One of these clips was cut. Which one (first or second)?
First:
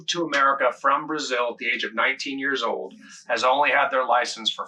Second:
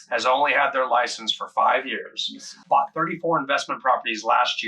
second